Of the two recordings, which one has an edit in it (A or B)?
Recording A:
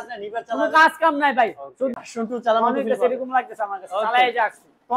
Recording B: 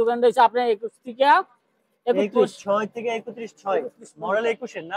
A